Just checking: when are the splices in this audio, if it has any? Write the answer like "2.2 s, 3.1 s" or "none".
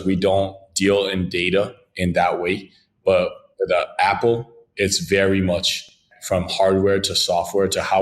6.1 s